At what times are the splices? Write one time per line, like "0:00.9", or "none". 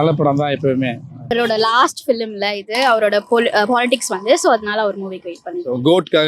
0:01.3

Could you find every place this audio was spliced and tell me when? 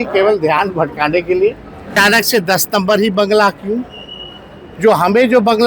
0:01.9

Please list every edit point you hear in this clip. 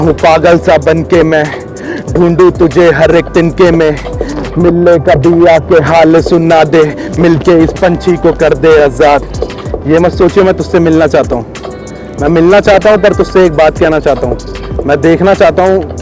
none

